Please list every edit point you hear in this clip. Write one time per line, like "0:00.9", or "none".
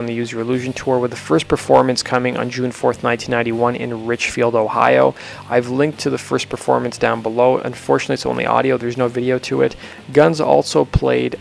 0:01.0